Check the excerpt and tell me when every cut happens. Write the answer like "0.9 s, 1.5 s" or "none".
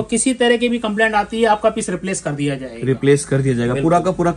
none